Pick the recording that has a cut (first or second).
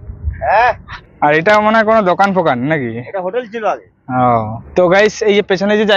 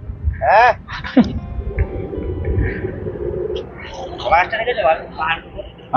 first